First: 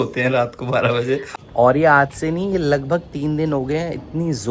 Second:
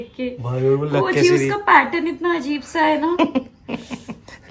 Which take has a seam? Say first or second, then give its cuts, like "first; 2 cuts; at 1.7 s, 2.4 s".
first; 1 cut; at 1.3 s